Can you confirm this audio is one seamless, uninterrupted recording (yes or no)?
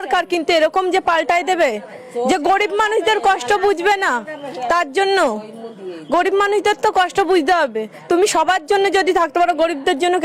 yes